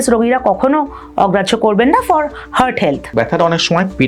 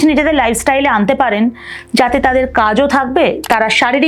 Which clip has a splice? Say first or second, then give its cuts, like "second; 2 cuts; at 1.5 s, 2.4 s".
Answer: first; 1 cut; at 3.1 s